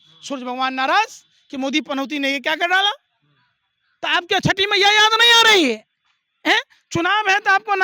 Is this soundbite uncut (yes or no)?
yes